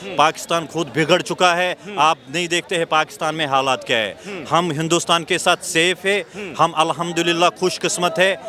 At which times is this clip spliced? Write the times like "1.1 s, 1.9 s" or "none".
none